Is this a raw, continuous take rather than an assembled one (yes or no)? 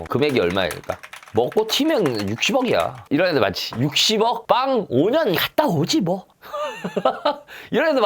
no